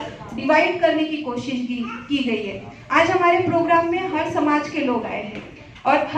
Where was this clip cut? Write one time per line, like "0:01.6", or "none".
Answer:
none